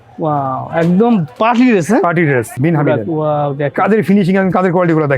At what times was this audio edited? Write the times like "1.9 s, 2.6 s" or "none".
2.6 s